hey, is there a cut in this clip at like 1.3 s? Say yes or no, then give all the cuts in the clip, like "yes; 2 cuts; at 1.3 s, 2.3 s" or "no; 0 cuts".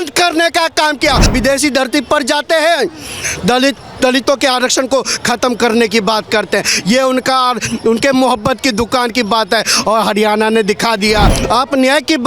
yes; 2 cuts; at 1.3 s, 11.3 s